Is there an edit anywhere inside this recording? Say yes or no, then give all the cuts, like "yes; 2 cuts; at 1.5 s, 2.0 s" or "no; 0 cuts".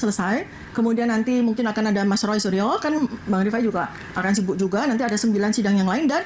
no; 0 cuts